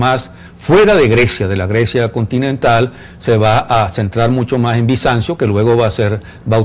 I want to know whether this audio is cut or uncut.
uncut